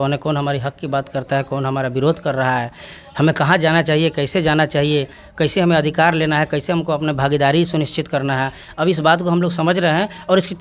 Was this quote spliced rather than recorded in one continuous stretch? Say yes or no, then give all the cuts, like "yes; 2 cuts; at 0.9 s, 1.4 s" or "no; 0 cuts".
no; 0 cuts